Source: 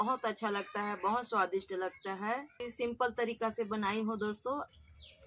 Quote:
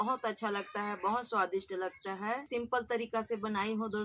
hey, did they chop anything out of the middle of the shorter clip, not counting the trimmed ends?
yes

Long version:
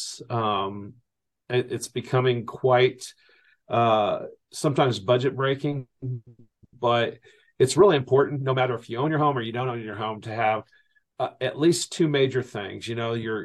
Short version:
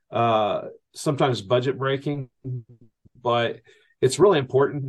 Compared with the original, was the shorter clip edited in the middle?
no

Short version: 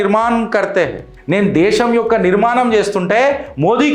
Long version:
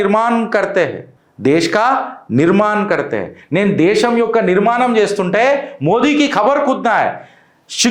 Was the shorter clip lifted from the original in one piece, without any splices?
no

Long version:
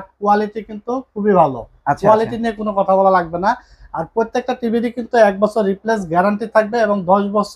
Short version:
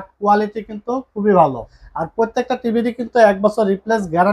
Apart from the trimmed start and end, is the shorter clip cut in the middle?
yes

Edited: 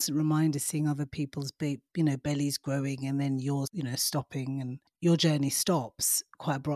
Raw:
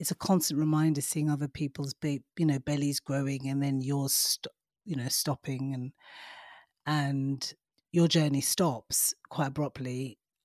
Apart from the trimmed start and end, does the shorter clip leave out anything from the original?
yes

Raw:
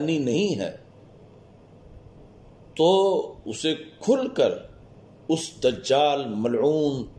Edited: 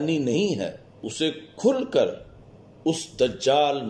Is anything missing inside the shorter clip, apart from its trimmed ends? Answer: yes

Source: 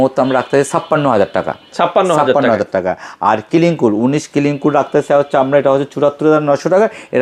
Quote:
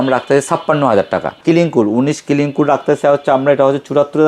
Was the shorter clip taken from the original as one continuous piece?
no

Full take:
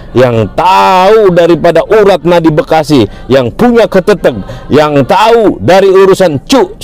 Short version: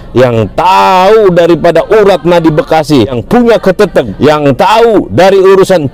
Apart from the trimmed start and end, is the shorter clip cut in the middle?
yes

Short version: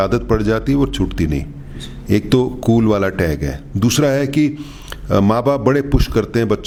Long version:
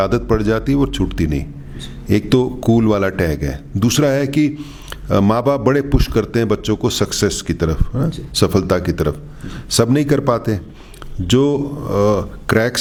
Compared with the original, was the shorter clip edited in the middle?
no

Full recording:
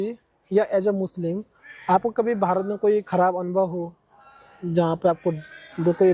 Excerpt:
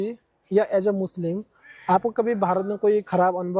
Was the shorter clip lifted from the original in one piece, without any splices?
yes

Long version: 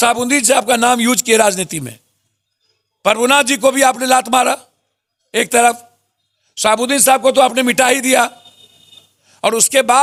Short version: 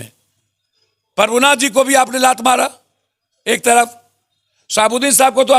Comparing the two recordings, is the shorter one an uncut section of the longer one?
yes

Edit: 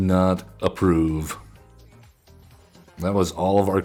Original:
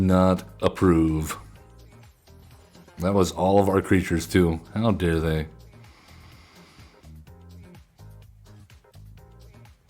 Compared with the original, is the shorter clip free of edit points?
yes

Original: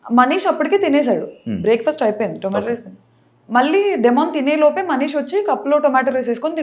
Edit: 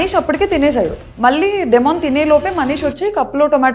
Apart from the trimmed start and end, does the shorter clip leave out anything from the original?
yes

